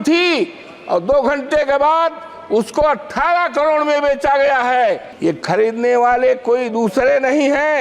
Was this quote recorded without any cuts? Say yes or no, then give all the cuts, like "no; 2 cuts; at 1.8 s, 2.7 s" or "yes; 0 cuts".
no; 1 cut; at 5.1 s